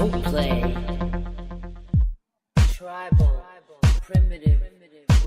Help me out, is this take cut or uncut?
cut